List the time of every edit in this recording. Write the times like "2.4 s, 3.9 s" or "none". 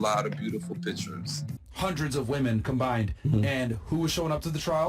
1.5 s